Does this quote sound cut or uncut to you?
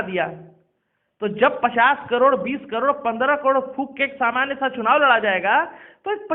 uncut